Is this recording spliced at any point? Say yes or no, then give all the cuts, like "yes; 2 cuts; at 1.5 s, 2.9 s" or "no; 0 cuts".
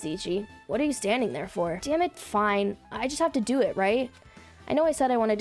yes; 1 cut; at 1.8 s